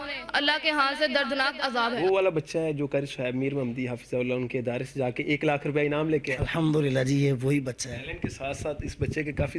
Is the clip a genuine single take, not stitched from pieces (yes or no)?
no